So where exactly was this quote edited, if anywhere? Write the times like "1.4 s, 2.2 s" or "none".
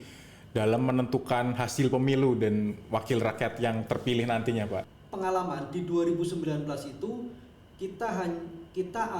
5.0 s